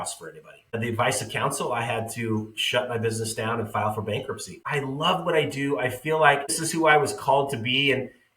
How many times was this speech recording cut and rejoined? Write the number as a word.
three